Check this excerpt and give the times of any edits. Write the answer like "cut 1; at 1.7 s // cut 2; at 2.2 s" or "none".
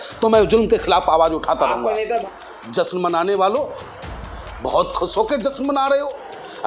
cut 1; at 2.3 s